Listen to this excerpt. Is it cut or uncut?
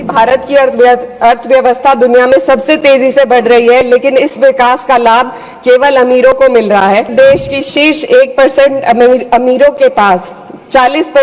cut